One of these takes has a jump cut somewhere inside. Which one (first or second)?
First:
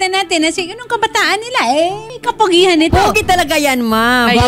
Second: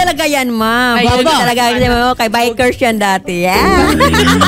first